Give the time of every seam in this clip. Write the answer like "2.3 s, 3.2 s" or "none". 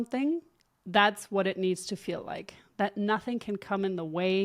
none